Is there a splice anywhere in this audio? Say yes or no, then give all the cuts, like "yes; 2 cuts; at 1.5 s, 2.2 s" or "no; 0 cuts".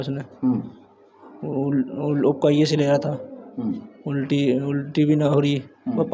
no; 0 cuts